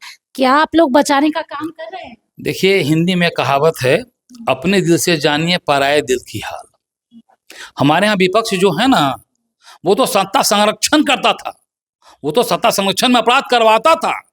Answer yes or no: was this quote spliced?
no